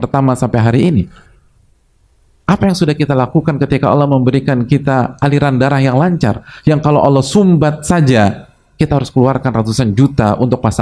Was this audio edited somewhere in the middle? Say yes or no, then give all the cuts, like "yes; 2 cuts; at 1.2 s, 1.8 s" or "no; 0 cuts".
no; 0 cuts